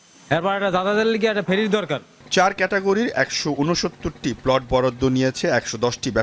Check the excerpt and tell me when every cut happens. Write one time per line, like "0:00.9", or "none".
none